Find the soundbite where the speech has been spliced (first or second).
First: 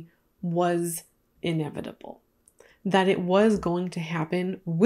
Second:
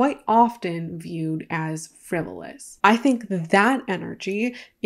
second